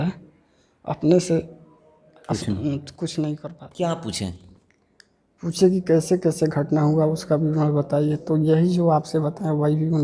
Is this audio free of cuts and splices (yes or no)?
no